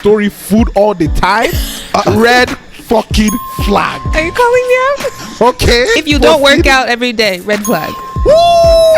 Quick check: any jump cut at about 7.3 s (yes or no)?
no